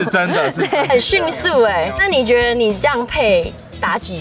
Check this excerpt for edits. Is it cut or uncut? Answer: cut